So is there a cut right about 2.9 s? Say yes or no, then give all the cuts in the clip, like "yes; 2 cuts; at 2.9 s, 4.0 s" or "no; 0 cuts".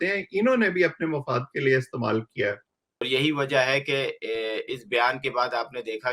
yes; 1 cut; at 2.9 s